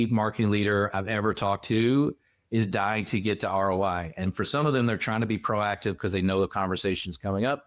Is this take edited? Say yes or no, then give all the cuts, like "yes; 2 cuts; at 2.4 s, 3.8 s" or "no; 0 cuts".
no; 0 cuts